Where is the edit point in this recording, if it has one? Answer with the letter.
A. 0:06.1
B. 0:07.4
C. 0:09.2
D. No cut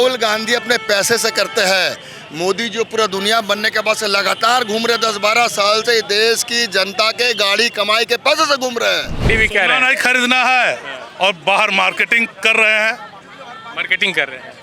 C